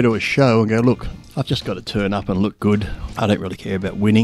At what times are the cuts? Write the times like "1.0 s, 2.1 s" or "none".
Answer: 1.2 s, 3.0 s